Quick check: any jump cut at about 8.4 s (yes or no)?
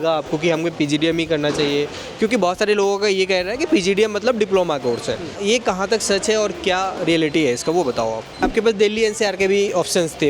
yes